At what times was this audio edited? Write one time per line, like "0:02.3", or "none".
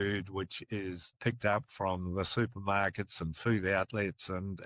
0:01.2